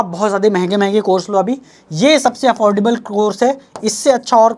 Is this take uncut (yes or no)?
yes